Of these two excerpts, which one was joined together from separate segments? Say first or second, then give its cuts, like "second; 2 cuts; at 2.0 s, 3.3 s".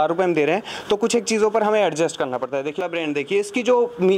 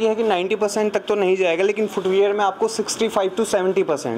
first; 1 cut; at 2.7 s